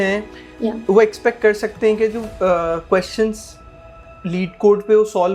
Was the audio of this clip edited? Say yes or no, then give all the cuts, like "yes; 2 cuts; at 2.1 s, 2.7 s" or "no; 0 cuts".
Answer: no; 0 cuts